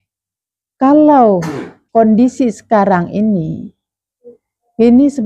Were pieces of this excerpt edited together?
yes; 1 cut; at 1.8 s

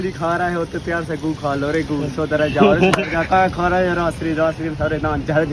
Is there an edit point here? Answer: no; 0 cuts

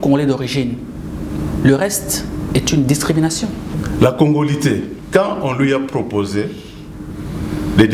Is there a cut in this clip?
yes; 2 cuts; at 3.7 s, 4.9 s

